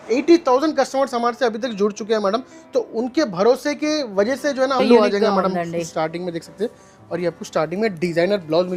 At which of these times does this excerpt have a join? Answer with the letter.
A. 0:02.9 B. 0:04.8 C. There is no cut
B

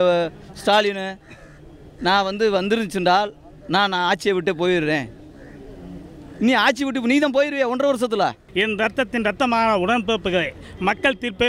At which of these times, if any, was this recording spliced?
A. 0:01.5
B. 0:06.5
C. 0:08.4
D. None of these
C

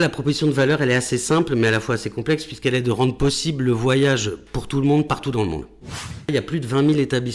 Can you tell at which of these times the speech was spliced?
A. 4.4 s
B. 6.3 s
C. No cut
B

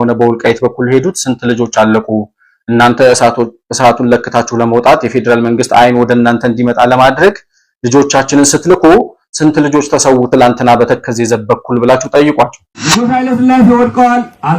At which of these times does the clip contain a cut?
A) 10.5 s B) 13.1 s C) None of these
B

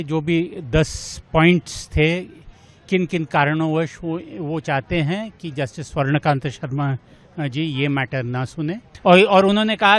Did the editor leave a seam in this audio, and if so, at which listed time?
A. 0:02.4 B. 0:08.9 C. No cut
B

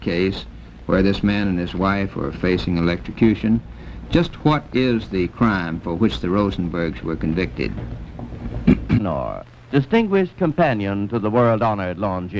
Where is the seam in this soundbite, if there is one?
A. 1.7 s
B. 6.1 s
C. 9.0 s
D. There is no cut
D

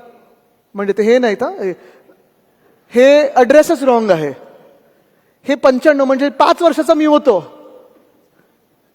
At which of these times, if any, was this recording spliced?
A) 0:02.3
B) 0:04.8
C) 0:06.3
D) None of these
D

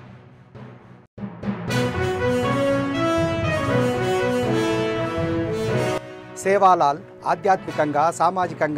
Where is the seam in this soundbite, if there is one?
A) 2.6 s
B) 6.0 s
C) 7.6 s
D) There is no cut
B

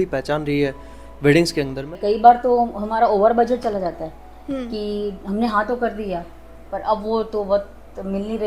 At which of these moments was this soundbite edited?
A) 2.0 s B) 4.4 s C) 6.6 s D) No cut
A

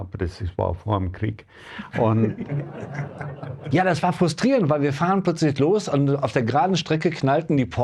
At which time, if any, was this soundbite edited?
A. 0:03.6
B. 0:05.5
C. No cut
A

